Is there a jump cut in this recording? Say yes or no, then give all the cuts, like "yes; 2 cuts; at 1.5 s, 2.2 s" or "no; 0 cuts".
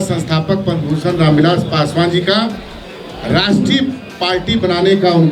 no; 0 cuts